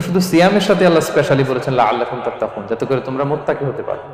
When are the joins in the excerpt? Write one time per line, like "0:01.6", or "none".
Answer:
none